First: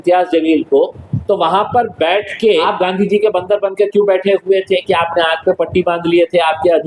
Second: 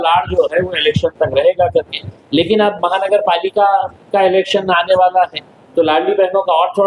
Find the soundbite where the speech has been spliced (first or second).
first